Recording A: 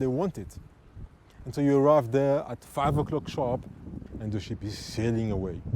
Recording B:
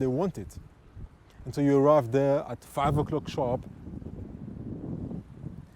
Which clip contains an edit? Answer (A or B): A